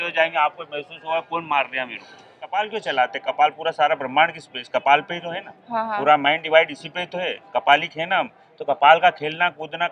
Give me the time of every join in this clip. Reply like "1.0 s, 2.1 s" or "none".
2.4 s